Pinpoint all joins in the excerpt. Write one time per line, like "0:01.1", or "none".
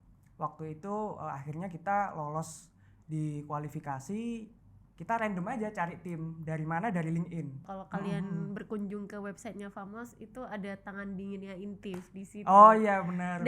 0:07.7

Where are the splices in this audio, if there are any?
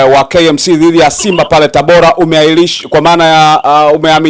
none

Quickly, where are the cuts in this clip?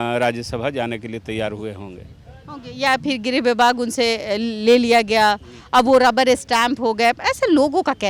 none

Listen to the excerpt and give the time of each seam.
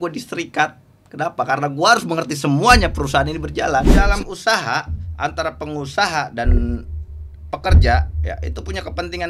0:04.0

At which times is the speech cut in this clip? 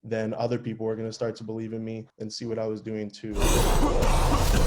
0:03.4

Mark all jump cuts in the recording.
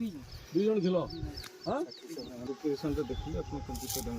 0:02.4

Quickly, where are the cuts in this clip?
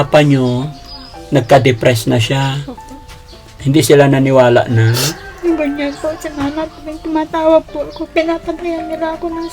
0:03.5

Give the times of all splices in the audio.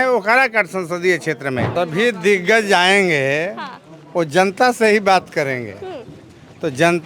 0:01.7

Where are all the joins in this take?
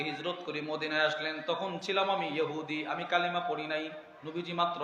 none

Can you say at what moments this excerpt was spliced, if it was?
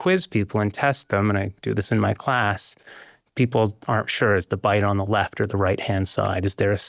none

